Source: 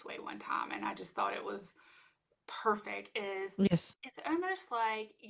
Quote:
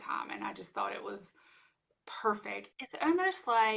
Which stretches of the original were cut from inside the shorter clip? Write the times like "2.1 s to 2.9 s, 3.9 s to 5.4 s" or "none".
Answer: 3.2 s to 4.0 s